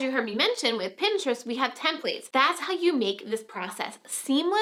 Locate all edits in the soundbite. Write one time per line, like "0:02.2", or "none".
none